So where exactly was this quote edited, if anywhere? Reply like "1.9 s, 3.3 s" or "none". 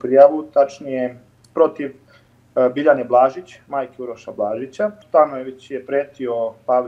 5.0 s

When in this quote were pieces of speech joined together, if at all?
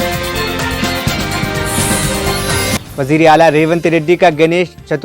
2.9 s

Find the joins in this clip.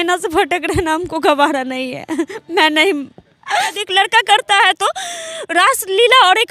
3.8 s

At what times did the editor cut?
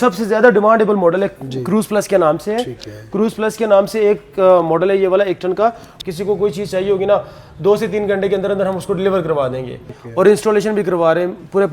5.9 s, 10.0 s

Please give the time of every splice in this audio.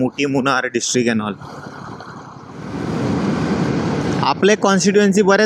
2.7 s

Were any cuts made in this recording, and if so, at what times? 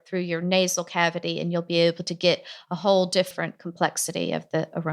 3.3 s

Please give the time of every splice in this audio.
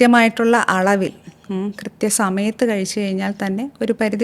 none

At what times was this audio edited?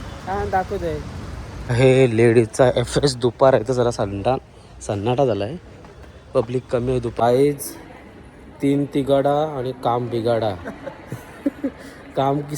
1.6 s, 7.2 s

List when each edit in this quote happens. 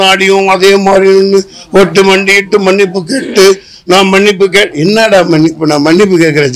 none

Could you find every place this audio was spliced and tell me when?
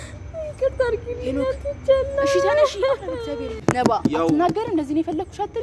3.6 s

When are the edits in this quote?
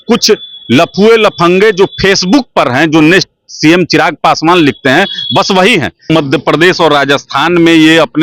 6.1 s

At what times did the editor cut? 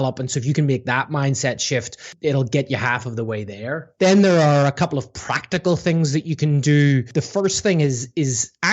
3.8 s, 7.1 s

